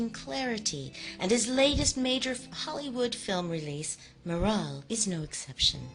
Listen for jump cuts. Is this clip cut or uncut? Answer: cut